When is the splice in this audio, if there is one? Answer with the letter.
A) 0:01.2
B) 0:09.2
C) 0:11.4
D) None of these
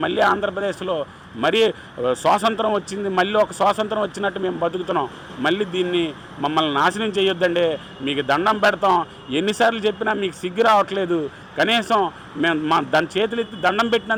D